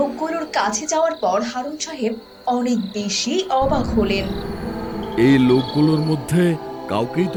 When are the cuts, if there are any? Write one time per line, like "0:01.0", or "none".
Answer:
none